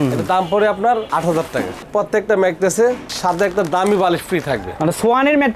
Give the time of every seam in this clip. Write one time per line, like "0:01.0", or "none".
0:01.9